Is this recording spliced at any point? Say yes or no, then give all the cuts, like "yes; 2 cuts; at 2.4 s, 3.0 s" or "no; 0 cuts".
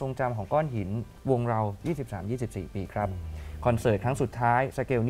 yes; 1 cut; at 1.1 s